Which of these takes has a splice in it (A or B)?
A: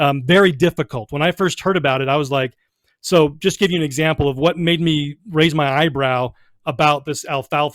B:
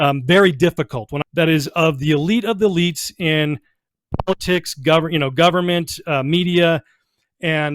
B